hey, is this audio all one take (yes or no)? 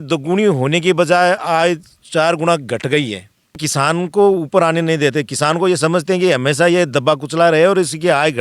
no